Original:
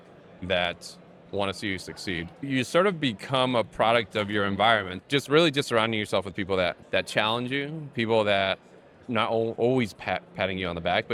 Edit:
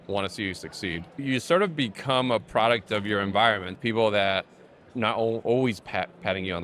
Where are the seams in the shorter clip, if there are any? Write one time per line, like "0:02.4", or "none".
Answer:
0:03.7